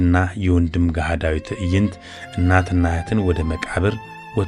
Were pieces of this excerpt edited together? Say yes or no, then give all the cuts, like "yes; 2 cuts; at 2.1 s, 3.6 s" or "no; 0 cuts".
no; 0 cuts